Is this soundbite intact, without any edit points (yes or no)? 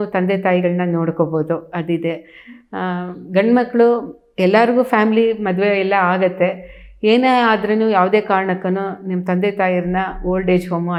yes